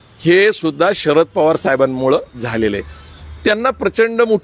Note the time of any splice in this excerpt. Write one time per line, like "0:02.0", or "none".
none